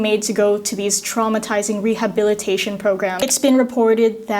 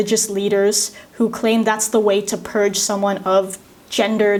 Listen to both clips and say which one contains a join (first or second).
first